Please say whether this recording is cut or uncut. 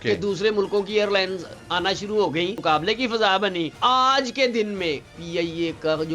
cut